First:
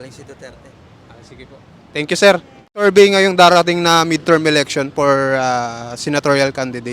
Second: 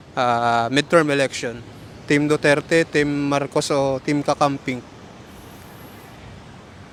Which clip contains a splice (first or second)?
first